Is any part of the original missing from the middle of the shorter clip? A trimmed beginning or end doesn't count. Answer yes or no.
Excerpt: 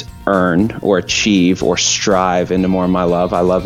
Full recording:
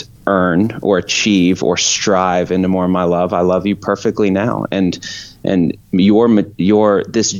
no